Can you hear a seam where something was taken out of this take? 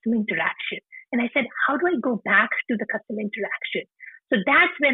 no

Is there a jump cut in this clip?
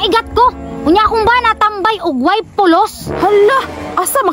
no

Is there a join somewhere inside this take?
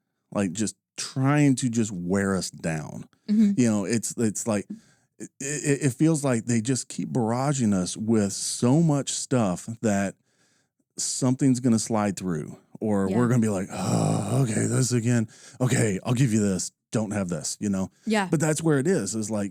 no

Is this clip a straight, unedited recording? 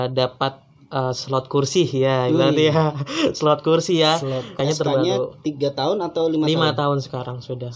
no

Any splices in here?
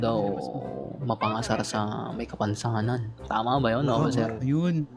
no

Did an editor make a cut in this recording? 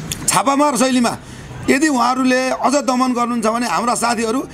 no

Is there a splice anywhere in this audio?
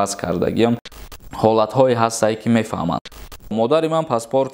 yes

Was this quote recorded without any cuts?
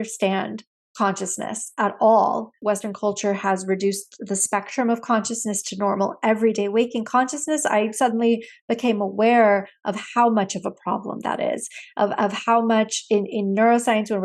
no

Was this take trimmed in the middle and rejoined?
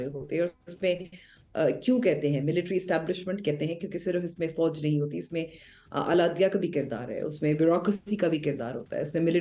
no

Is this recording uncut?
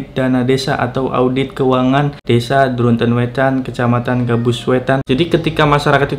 no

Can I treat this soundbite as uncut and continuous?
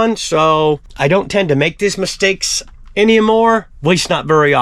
no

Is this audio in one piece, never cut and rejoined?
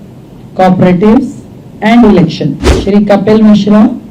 no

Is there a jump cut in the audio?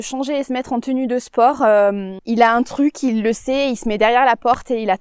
yes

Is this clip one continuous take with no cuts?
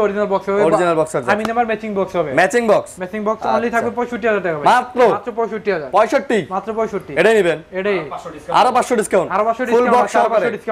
yes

